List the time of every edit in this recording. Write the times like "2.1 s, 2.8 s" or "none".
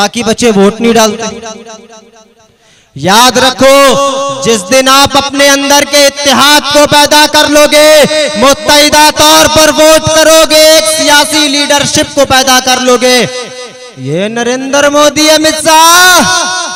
none